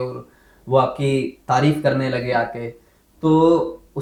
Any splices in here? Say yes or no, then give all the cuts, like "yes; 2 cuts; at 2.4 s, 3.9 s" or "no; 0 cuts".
no; 0 cuts